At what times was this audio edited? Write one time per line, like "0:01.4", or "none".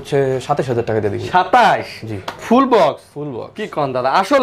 none